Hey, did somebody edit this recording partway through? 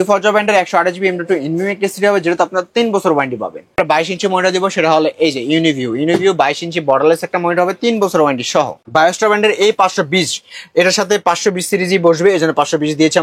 yes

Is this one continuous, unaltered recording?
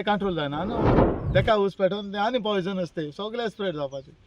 no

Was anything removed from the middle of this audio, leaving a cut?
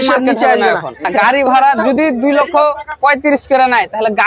yes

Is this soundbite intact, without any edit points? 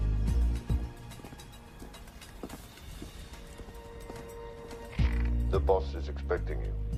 yes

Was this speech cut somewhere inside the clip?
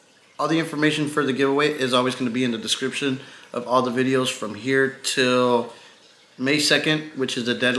no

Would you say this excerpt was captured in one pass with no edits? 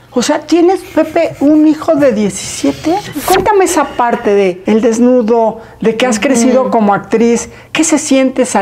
no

